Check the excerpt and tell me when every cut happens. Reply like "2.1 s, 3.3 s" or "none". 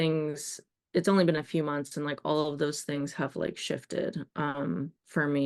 none